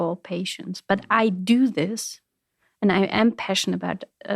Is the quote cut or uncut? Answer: uncut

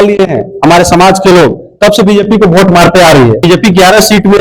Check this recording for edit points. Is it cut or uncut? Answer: cut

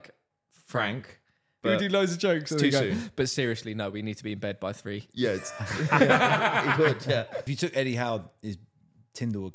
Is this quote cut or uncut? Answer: cut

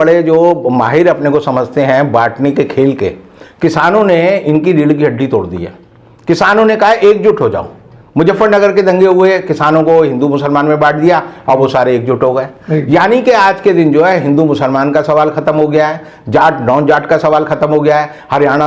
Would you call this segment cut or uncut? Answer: uncut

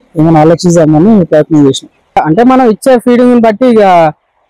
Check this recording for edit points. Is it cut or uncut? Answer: cut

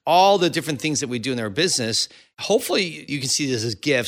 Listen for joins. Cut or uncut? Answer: cut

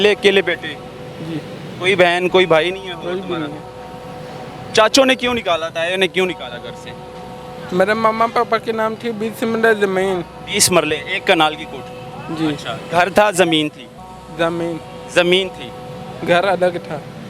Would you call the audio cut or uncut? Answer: uncut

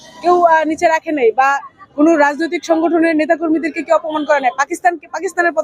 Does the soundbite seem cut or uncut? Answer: uncut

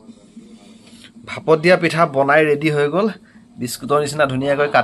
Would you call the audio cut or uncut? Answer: uncut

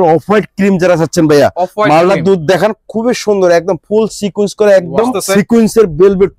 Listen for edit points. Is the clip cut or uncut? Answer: cut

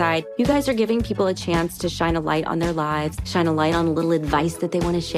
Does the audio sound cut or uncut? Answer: uncut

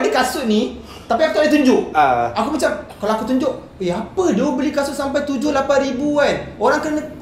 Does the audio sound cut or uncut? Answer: uncut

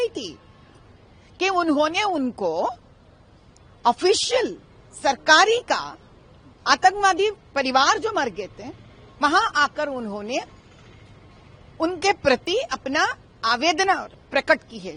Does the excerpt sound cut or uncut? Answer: uncut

